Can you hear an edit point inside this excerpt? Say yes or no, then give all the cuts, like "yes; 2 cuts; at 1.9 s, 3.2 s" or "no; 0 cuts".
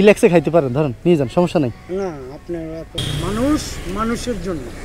yes; 1 cut; at 3.0 s